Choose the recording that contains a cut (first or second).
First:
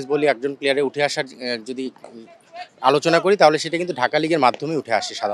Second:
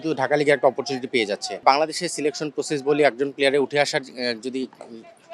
second